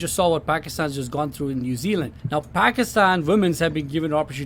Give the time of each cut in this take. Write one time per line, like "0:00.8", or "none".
0:02.2